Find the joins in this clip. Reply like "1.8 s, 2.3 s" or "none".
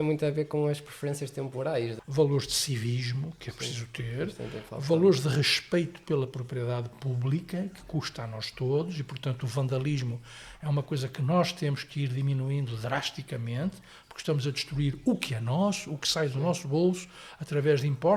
2.0 s